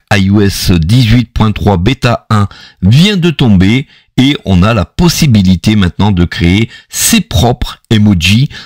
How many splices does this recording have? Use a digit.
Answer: 1